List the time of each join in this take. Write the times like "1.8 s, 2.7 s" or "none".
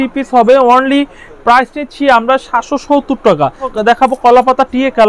3.7 s